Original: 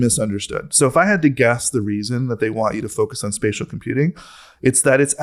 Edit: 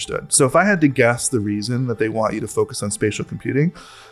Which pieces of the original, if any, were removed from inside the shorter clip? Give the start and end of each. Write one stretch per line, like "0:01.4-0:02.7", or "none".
none